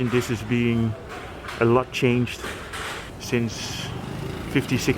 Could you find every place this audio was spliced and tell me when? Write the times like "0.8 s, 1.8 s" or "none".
3.1 s